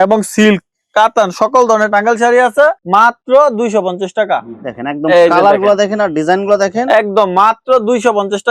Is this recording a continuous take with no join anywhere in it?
yes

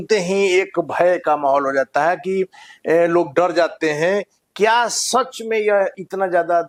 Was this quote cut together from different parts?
no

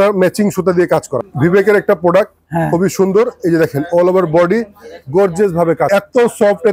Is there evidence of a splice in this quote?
yes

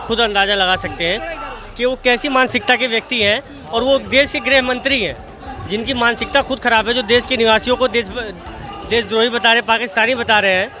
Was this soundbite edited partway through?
no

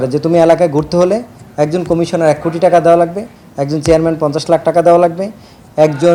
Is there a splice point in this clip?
no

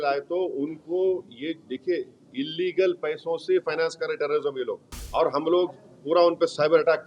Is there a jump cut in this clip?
yes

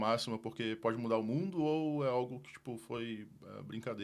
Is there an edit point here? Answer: no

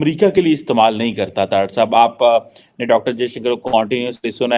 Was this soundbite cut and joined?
no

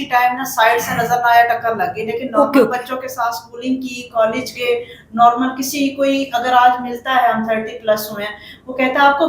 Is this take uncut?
yes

